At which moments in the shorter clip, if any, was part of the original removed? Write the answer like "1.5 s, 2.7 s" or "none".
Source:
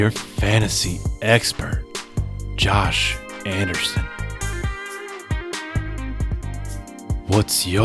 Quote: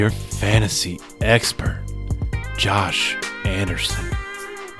3.8 s

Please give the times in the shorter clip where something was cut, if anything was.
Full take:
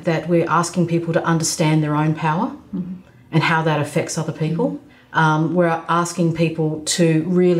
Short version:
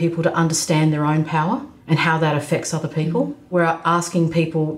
1.7 s, 3.5 s

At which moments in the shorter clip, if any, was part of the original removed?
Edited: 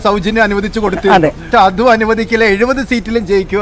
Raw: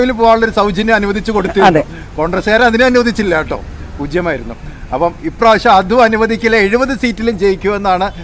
1.5 s

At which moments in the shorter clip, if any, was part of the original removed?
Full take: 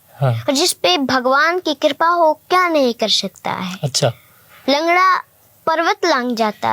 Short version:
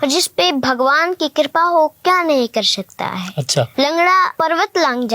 3.7 s, 4.3 s

